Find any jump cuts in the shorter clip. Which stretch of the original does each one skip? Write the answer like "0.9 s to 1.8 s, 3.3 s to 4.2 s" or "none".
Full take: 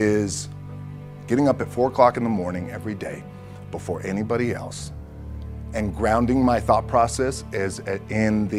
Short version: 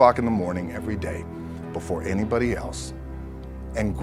none